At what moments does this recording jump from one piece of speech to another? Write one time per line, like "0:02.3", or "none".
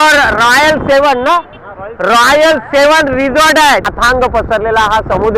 0:03.9